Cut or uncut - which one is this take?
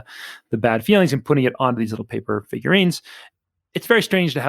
cut